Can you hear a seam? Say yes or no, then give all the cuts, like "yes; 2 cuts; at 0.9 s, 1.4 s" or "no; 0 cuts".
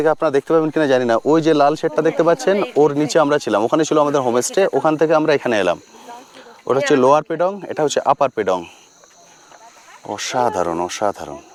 no; 0 cuts